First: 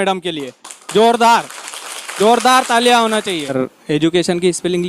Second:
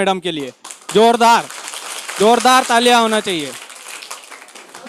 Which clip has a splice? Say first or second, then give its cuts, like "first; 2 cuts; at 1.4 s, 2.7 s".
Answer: first; 1 cut; at 3.5 s